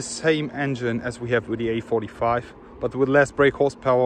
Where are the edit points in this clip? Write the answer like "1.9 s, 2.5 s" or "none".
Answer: none